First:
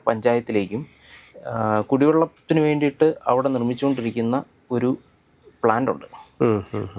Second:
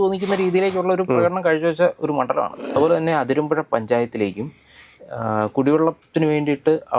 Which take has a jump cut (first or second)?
second